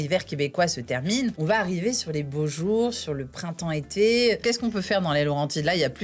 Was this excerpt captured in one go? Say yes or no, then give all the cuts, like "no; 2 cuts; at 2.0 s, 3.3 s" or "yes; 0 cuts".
no; 2 cuts; at 1.4 s, 4.4 s